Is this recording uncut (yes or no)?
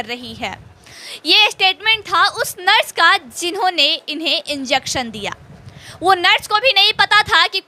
yes